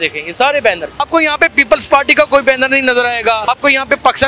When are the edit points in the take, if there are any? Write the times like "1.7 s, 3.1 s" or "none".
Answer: 1.0 s, 3.5 s